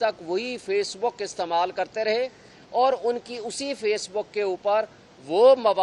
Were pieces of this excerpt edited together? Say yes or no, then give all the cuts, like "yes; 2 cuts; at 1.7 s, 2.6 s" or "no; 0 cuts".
no; 0 cuts